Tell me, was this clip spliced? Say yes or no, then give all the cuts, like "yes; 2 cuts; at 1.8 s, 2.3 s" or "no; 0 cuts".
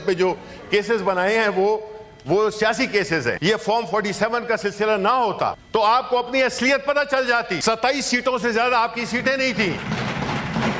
yes; 3 cuts; at 3.4 s, 5.6 s, 7.5 s